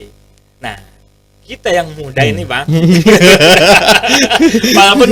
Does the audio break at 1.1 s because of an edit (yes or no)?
no